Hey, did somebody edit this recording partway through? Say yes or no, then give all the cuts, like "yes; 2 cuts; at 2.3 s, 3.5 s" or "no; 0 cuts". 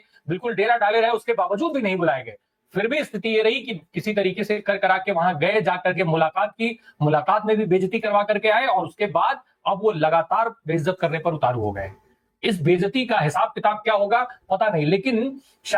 no; 0 cuts